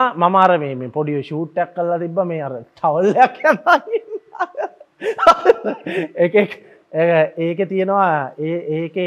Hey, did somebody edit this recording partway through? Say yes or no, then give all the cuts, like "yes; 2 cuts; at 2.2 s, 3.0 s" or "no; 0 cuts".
no; 0 cuts